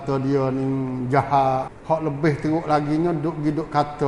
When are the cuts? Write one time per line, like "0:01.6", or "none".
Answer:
0:01.7